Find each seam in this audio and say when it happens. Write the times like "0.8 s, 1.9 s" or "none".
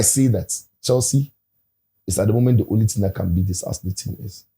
none